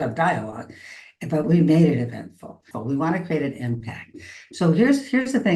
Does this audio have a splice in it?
yes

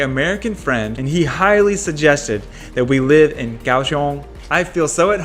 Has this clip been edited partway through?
yes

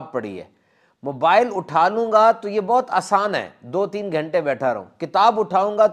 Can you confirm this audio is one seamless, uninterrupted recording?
yes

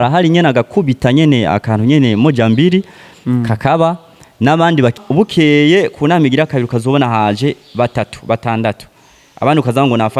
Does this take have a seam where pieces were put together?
yes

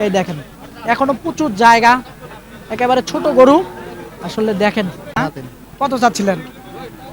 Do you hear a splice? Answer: yes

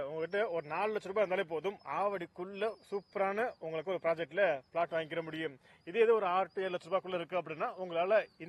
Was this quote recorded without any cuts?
yes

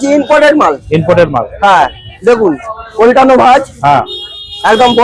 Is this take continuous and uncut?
yes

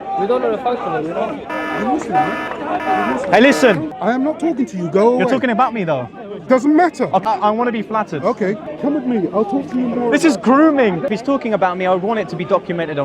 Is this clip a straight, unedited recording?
no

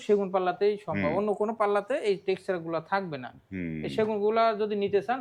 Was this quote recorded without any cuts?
yes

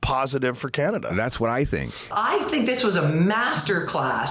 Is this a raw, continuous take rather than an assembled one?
no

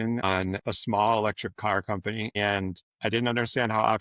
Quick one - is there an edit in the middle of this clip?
yes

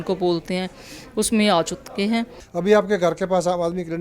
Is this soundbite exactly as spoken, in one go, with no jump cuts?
no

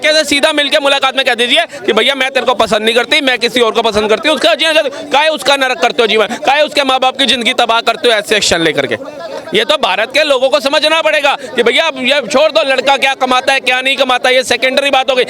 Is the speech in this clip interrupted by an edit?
no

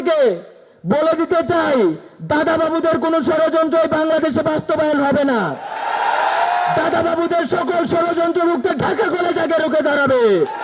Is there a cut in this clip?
no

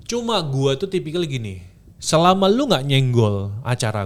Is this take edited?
no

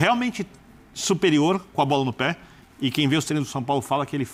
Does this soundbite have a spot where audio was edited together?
no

